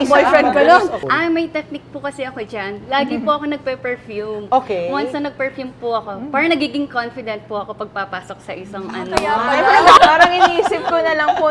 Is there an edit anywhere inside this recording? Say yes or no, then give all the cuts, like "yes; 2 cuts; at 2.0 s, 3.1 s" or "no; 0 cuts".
yes; 2 cuts; at 1.1 s, 10.0 s